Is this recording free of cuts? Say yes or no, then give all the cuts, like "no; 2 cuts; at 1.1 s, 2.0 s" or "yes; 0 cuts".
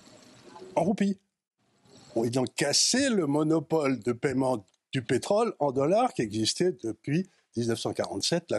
yes; 0 cuts